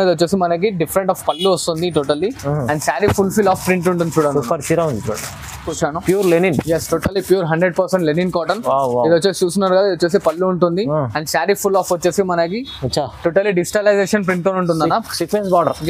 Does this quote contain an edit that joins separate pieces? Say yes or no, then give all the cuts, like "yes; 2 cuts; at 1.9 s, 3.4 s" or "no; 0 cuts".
yes; 1 cut; at 5.7 s